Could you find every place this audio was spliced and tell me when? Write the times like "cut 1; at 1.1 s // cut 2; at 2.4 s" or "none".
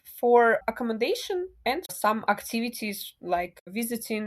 cut 1; at 1.9 s // cut 2; at 3.6 s